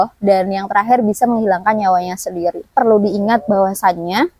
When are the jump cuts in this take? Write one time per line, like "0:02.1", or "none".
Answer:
0:02.7